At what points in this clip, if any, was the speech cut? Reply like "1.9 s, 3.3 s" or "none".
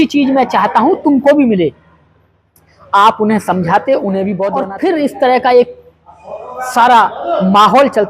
4.5 s